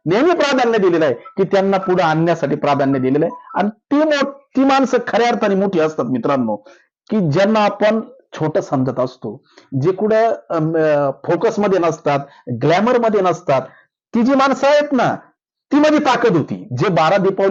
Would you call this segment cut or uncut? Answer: uncut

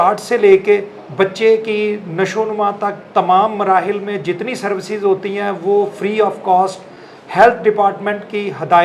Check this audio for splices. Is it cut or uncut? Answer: uncut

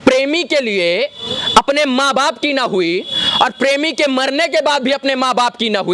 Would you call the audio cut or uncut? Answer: uncut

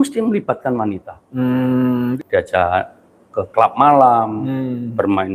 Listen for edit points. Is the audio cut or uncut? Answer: cut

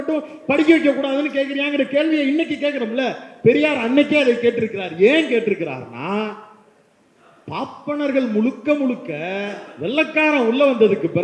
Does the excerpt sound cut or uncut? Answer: uncut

